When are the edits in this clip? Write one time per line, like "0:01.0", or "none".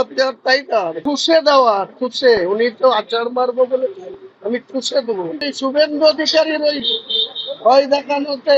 0:01.0
0:05.5